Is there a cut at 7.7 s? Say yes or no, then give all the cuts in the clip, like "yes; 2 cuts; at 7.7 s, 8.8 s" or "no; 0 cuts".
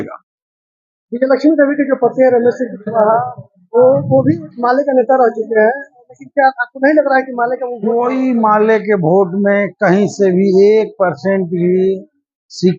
yes; 1 cut; at 7.7 s